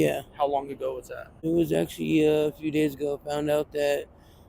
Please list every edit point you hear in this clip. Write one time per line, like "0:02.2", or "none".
0:01.4